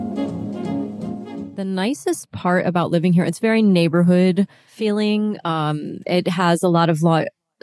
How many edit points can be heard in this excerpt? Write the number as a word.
one